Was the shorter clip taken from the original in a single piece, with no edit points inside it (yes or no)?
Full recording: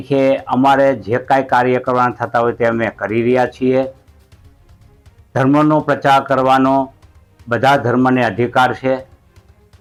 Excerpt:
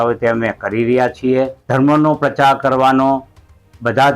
no